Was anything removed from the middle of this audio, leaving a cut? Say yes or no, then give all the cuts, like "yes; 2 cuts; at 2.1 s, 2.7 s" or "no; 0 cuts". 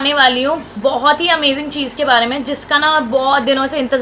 no; 0 cuts